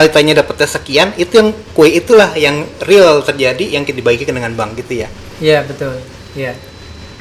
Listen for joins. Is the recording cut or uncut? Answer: uncut